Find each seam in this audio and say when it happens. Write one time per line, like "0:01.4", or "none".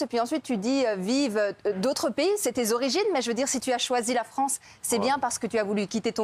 none